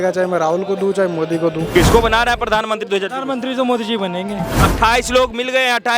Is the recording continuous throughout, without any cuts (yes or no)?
no